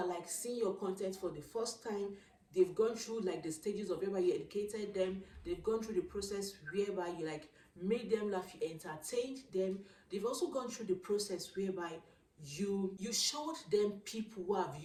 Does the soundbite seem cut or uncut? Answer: uncut